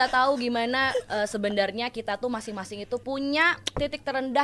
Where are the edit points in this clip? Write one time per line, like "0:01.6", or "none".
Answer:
0:03.0